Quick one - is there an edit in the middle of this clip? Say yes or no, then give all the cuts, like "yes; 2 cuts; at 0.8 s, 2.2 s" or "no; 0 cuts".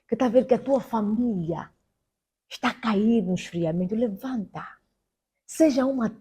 no; 0 cuts